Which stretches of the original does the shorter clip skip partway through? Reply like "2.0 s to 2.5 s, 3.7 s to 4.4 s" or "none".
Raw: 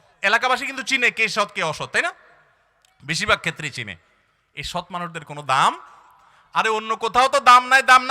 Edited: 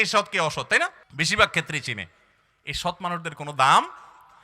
2.3 s to 2.9 s